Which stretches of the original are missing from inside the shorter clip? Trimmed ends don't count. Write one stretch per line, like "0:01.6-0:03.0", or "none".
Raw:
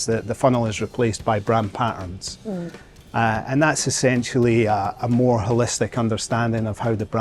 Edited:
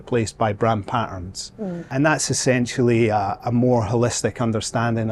0:02.7-0:03.4